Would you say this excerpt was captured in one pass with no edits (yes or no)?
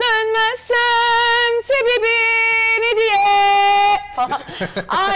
yes